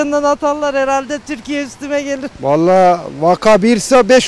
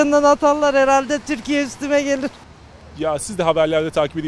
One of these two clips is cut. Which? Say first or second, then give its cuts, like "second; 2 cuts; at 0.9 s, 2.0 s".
second; 1 cut; at 2.3 s